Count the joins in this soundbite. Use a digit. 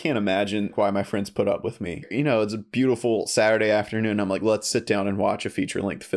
2